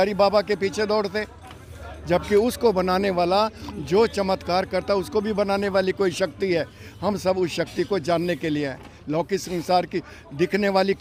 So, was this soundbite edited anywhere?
no; 0 cuts

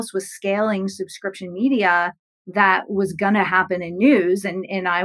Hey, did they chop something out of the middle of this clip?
no; 0 cuts

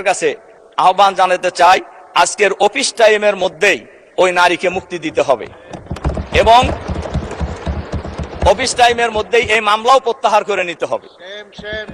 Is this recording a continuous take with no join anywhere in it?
yes; 0 cuts

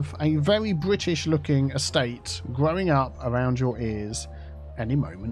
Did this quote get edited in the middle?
no; 0 cuts

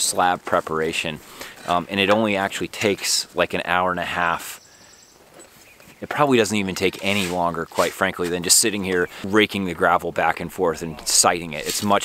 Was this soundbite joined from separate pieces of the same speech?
yes; 1 cut; at 9.2 s

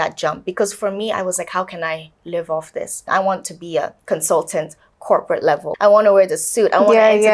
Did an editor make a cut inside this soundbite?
yes; 3 cuts; at 3.0 s, 4.0 s, 5.7 s

